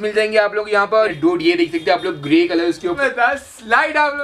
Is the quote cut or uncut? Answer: cut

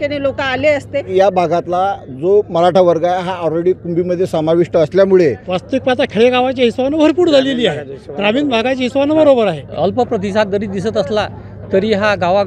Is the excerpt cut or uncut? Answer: cut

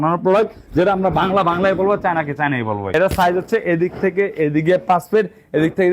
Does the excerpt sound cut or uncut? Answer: cut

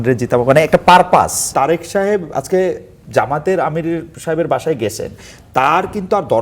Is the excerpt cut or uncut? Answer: cut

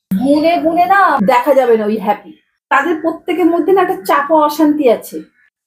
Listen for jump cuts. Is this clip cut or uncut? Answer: uncut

